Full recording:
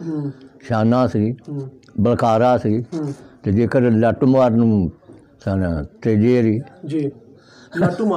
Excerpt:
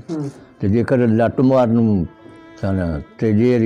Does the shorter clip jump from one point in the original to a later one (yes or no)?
no